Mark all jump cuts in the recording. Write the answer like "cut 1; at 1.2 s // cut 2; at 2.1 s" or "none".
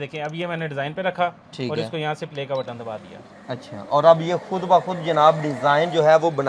none